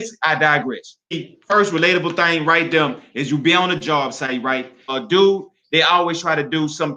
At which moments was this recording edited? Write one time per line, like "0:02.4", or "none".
0:01.3
0:04.9